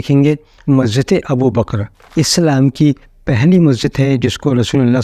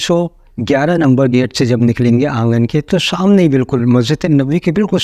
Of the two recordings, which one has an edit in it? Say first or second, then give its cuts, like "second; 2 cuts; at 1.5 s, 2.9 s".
first; 1 cut; at 2.0 s